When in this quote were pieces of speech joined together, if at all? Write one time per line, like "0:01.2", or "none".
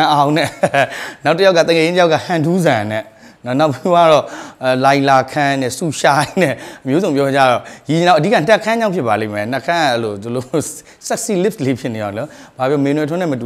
none